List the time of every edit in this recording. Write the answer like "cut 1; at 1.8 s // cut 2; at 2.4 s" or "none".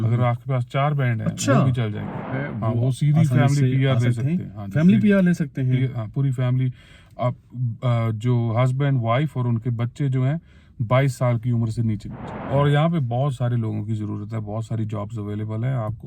cut 1; at 2.4 s // cut 2; at 12.5 s